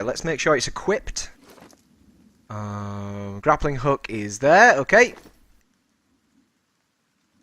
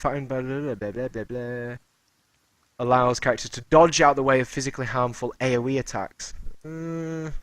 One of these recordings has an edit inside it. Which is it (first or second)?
first